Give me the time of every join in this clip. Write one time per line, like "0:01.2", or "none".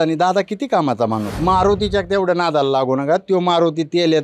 0:01.3